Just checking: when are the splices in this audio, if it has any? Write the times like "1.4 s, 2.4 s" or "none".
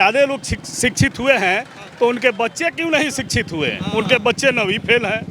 3.8 s